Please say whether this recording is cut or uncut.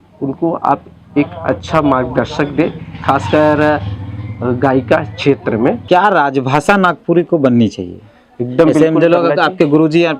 cut